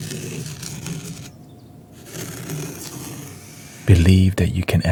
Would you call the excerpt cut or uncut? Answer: uncut